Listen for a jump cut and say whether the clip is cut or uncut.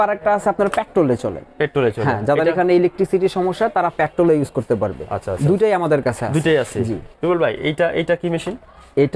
cut